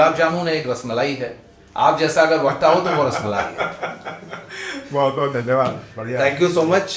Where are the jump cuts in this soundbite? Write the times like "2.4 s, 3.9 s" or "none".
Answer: none